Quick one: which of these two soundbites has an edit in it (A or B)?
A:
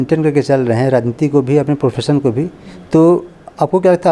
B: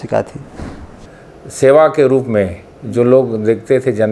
B